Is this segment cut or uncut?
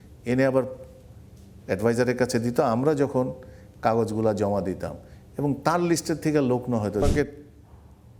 cut